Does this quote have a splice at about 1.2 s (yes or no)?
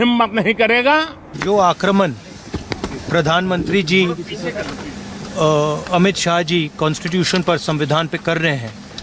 yes